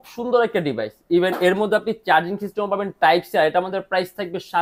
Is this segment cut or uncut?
uncut